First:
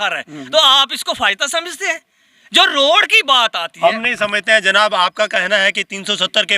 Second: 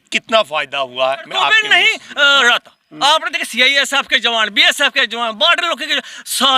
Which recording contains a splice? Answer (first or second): second